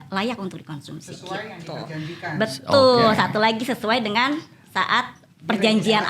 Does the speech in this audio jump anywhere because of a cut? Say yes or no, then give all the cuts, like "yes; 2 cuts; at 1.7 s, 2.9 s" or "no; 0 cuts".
no; 0 cuts